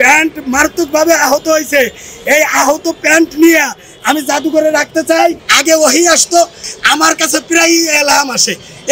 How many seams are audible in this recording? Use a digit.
2